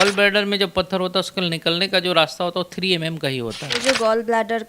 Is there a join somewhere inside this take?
yes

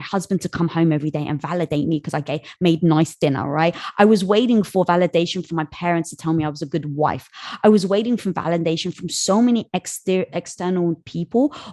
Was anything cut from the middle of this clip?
no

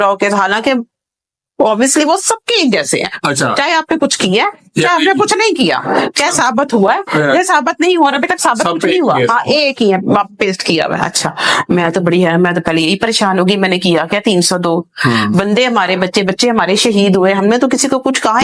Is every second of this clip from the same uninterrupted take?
yes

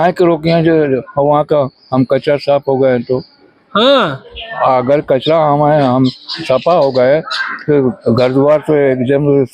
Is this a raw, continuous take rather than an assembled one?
yes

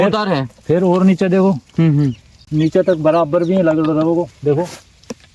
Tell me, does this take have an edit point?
no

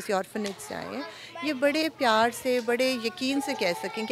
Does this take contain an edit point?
no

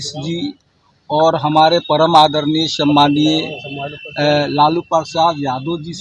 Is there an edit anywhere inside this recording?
no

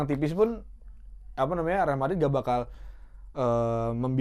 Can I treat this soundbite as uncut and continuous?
yes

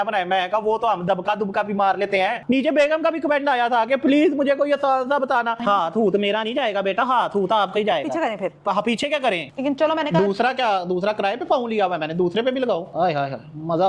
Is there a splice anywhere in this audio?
yes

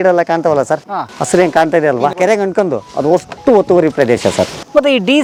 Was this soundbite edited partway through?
no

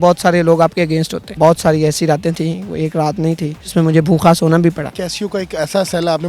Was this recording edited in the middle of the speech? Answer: yes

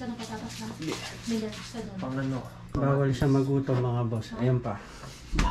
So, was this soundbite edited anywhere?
no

